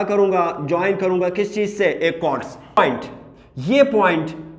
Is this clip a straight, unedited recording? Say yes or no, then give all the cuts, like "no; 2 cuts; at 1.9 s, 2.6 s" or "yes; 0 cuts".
no; 1 cut; at 2.8 s